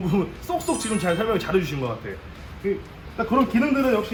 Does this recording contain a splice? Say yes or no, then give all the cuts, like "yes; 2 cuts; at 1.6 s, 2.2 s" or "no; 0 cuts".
no; 0 cuts